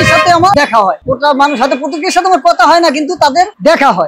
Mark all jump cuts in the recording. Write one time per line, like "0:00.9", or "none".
none